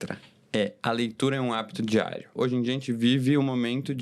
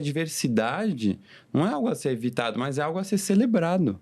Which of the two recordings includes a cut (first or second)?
first